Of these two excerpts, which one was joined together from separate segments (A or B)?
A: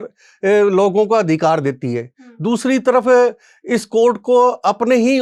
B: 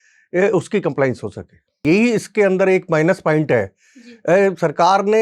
B